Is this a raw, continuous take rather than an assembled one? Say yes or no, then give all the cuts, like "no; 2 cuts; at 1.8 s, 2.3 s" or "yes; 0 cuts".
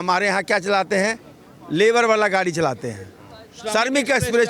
yes; 0 cuts